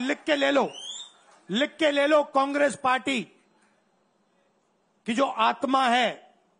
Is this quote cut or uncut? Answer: uncut